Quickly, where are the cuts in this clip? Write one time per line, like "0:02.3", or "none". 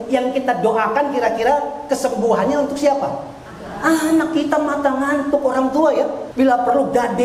0:06.2